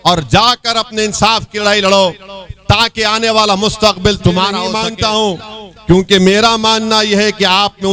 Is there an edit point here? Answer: yes; 1 cut; at 4.8 s

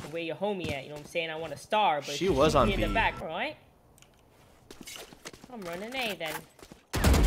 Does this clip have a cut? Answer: yes; 1 cut; at 3.2 s

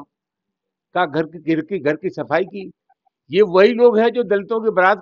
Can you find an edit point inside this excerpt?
no; 0 cuts

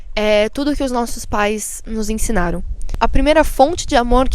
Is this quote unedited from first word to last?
no; 1 cut; at 2.8 s

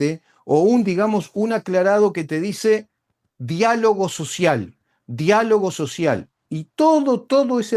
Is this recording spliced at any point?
no; 0 cuts

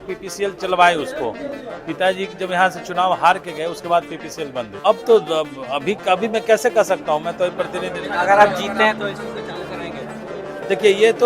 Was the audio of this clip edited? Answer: yes; 1 cut; at 4.8 s

